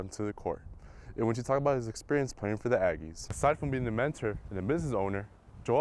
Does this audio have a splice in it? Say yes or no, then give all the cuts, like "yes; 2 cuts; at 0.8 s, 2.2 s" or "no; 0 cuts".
yes; 1 cut; at 3.3 s